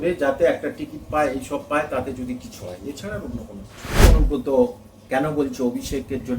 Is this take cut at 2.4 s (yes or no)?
no